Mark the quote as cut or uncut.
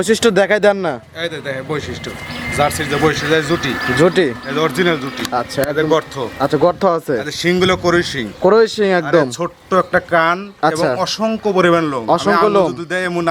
uncut